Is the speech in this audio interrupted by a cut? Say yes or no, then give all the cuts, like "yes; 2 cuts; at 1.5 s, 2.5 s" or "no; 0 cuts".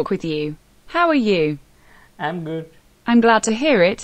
yes; 1 cut; at 2.8 s